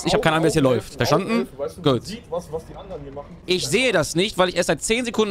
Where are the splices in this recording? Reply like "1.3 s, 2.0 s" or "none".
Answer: 3.3 s